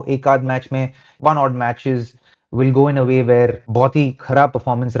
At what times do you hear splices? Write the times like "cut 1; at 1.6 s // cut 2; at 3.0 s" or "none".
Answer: cut 1; at 3.6 s